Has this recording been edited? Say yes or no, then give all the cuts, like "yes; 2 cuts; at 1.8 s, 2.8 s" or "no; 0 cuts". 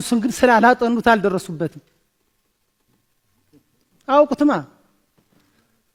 no; 0 cuts